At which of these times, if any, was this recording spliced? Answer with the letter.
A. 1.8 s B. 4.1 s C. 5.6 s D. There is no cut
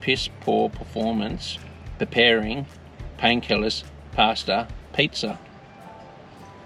D